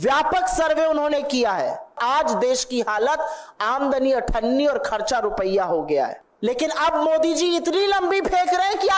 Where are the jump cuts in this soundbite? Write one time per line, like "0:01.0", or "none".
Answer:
0:02.0
0:06.2